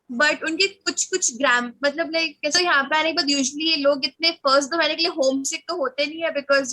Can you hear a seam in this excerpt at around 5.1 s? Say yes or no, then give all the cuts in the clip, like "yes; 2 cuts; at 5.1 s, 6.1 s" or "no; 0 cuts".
no; 1 cut; at 2.6 s